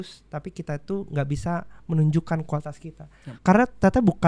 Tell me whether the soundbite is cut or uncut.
uncut